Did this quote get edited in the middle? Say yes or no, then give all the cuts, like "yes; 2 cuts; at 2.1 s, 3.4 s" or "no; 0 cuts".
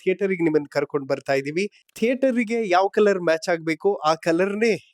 yes; 1 cut; at 1.8 s